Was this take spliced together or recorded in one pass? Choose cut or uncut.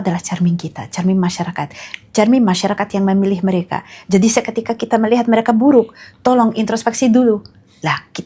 uncut